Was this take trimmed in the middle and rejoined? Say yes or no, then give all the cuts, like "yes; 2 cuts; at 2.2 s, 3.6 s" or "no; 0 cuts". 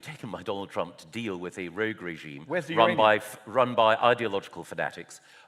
no; 0 cuts